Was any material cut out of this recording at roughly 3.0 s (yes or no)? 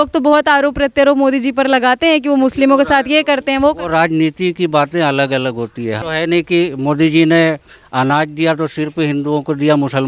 no